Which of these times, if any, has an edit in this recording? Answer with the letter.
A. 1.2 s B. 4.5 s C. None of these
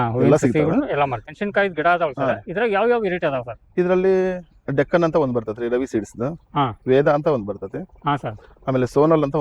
A